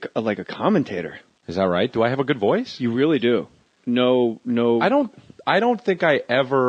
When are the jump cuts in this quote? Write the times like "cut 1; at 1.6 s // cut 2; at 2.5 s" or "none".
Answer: cut 1; at 5.5 s